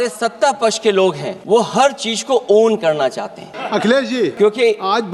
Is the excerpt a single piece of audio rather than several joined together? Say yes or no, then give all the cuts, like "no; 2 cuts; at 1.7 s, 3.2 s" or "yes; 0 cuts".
no; 3 cuts; at 1.3 s, 3.5 s, 4.3 s